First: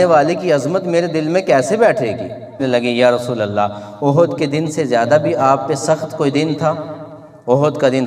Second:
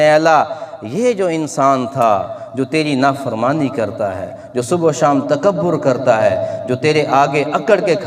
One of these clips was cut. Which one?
first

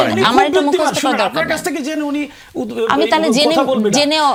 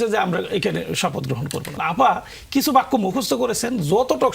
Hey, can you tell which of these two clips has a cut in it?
second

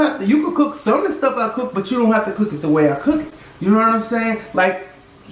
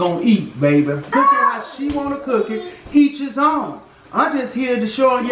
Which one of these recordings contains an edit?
second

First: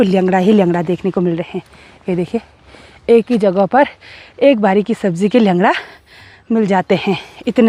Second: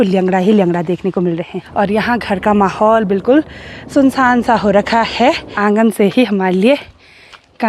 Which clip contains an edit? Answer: second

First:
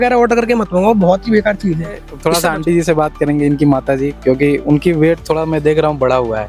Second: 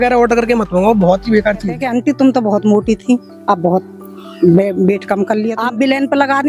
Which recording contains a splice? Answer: second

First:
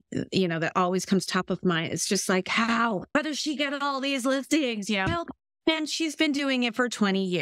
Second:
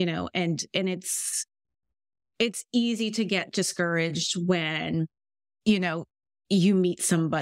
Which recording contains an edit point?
first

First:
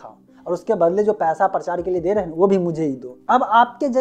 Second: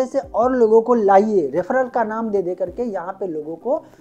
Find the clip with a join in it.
first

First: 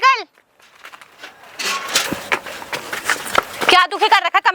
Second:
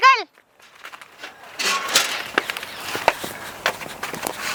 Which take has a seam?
first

